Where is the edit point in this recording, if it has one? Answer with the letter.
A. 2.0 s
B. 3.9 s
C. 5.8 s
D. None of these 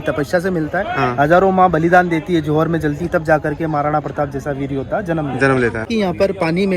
C